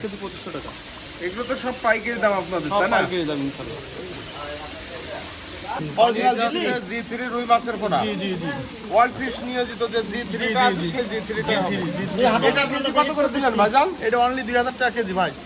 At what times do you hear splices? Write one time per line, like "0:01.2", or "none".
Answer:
none

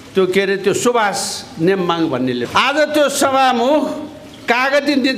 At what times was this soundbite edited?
0:02.4

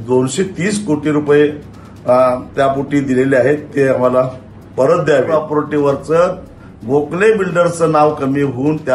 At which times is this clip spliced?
0:05.3

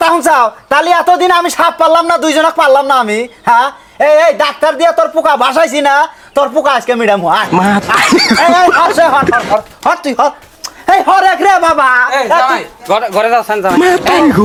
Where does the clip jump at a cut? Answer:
none

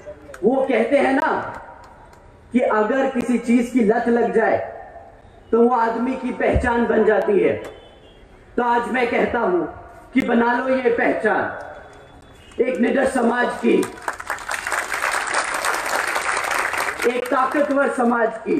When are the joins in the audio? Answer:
none

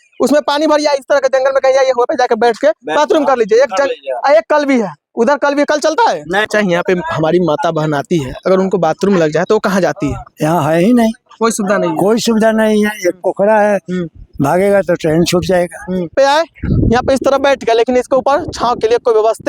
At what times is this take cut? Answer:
0:06.5
0:16.1

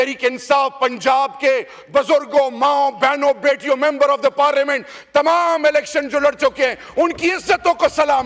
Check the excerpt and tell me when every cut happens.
none

